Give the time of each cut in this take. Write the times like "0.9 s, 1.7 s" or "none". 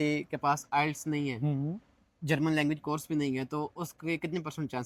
none